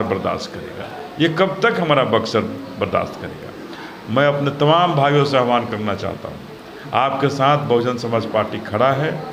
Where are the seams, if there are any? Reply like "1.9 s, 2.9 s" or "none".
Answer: none